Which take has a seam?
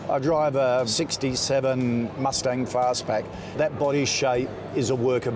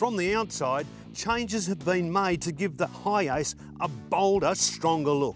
first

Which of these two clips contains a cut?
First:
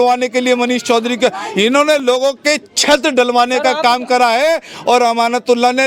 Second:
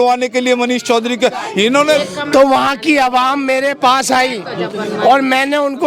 second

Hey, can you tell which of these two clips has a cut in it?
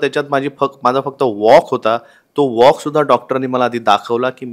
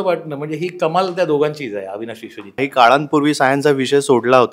second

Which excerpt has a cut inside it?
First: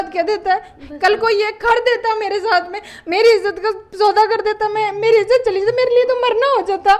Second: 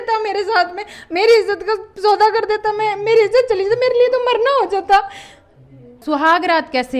second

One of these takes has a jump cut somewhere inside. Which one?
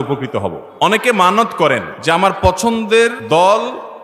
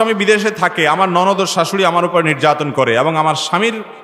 first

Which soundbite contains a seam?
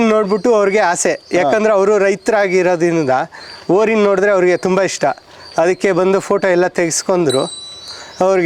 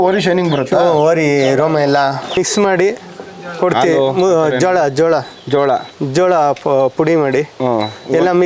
second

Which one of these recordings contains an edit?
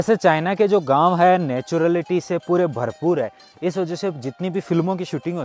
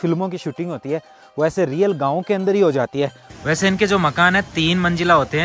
second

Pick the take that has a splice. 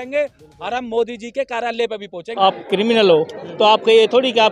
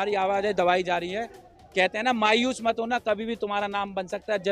first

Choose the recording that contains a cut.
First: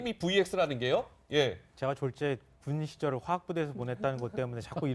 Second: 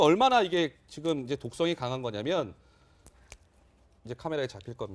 second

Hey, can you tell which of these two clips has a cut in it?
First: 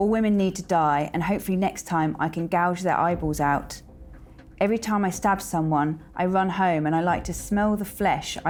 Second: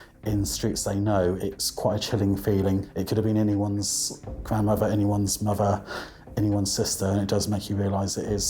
second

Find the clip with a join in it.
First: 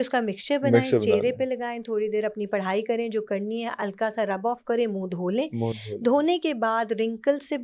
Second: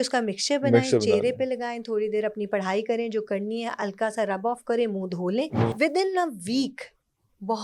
second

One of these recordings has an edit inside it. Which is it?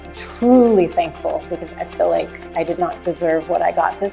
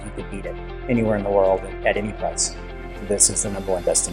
first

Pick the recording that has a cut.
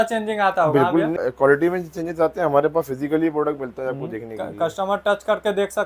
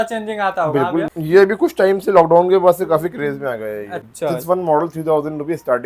second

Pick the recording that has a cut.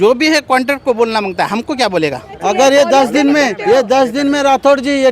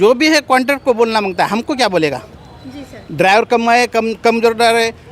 first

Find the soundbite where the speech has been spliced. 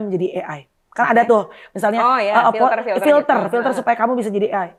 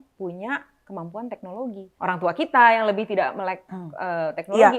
second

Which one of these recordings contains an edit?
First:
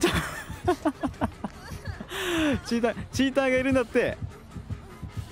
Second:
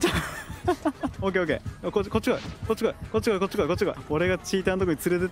second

